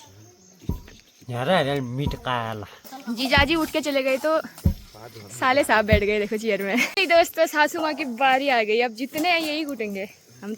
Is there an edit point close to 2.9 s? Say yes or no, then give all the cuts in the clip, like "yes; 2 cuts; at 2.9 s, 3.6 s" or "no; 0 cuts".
yes; 2 cuts; at 2.9 s, 6.9 s